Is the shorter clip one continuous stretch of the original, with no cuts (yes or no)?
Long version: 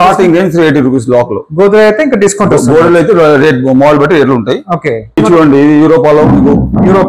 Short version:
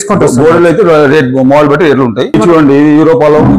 no